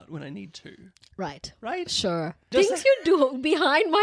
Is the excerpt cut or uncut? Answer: cut